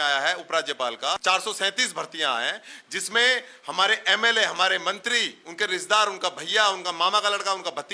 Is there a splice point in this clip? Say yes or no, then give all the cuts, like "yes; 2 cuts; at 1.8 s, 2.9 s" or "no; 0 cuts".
yes; 1 cut; at 1.2 s